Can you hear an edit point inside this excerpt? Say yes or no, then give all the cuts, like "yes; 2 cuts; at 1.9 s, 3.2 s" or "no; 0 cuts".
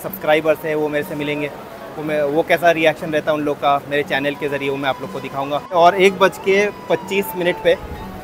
yes; 1 cut; at 5.7 s